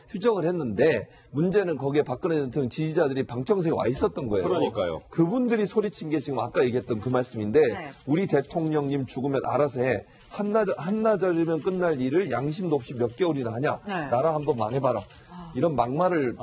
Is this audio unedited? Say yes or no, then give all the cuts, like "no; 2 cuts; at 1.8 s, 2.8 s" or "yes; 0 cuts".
yes; 0 cuts